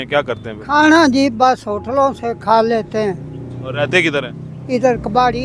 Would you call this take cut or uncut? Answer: uncut